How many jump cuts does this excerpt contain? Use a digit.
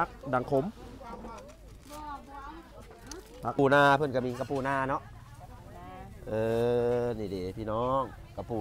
1